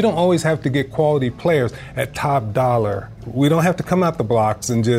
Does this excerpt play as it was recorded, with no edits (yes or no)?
no